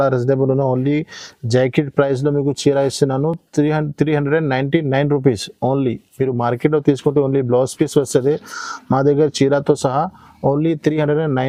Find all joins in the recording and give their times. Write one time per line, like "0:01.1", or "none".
none